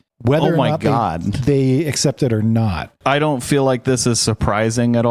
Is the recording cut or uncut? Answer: cut